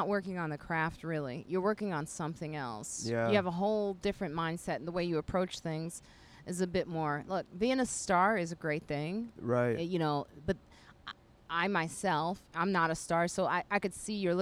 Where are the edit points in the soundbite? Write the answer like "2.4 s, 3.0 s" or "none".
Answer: none